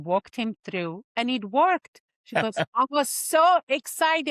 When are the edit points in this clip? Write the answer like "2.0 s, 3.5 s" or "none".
2.4 s